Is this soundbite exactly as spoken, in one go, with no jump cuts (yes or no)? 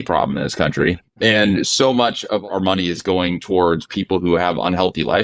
no